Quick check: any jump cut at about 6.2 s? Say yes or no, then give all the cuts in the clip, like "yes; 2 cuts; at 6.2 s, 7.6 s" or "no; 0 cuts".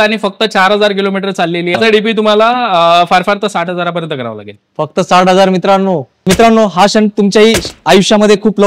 yes; 2 cuts; at 1.7 s, 6.2 s